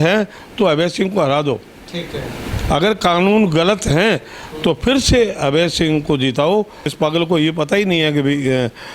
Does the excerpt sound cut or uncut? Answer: cut